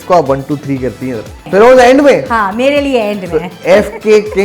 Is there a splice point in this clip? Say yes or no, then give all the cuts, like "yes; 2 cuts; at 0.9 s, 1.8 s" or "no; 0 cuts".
yes; 1 cut; at 1.5 s